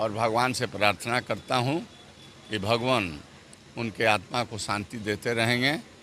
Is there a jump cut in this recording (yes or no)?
no